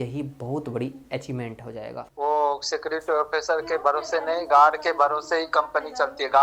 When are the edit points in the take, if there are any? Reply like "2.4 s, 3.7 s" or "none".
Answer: 2.2 s